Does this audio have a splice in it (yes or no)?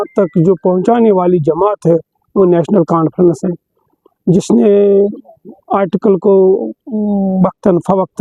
no